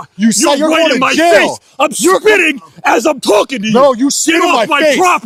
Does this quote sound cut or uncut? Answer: uncut